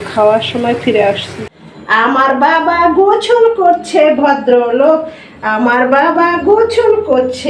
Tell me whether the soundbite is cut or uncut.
cut